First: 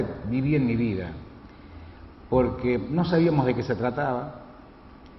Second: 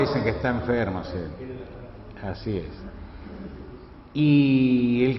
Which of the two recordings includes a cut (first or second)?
second